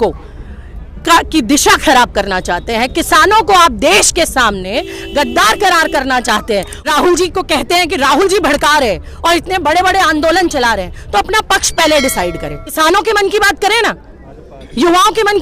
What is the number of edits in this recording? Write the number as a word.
two